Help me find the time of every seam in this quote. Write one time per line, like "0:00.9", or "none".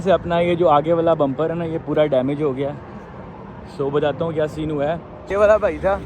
0:05.2